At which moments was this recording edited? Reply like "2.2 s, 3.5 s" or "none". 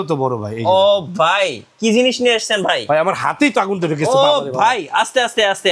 none